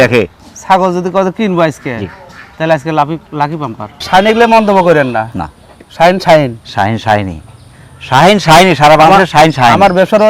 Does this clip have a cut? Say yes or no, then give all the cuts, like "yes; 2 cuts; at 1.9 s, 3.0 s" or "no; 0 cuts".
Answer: yes; 1 cut; at 3.9 s